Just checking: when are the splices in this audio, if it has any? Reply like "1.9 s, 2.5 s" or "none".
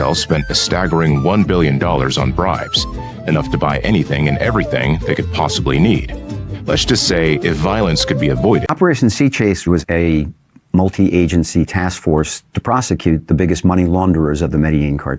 8.7 s